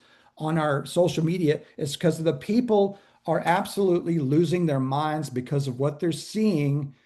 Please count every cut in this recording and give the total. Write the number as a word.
zero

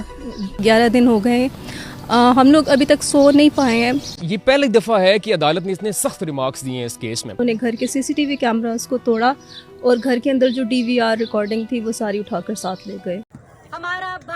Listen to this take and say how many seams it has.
one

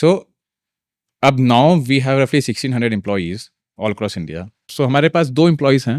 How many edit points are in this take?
one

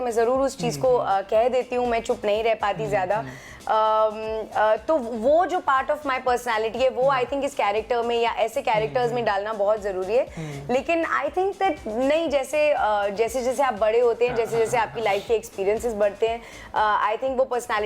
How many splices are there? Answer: zero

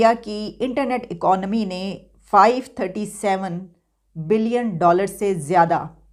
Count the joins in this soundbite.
zero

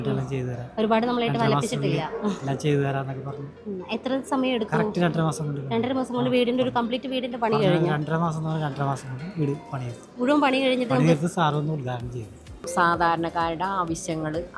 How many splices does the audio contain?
one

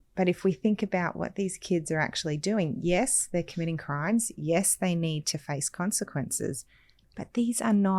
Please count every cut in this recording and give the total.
zero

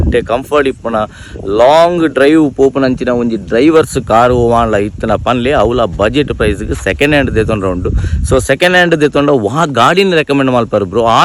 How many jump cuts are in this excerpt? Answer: zero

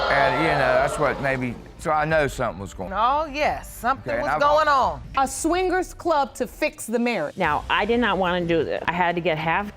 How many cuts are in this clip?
three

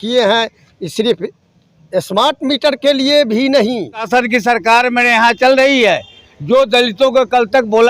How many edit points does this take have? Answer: one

